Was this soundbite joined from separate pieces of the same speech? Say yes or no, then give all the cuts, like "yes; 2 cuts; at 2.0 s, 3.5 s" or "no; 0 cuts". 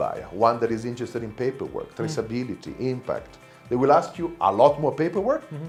no; 0 cuts